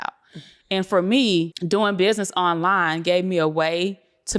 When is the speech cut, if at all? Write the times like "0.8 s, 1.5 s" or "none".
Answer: 1.6 s